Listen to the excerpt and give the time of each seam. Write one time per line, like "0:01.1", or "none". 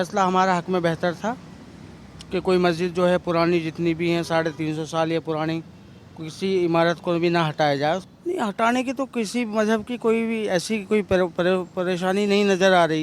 0:08.1

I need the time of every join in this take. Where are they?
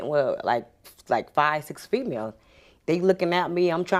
none

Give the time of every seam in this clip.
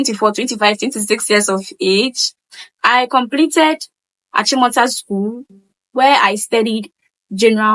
0:04.3

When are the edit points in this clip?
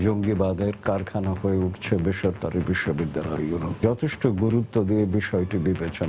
0:03.8

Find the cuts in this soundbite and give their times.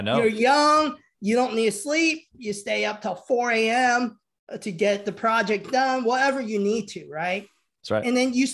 none

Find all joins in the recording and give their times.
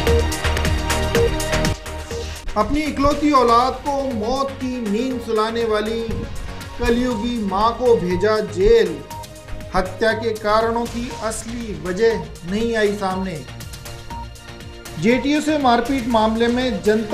0:01.7

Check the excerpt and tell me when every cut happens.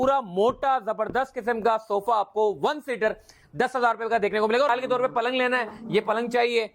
0:04.7

